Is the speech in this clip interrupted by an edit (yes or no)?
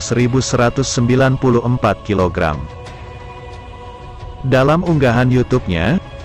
yes